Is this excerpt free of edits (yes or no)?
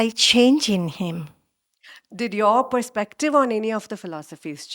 yes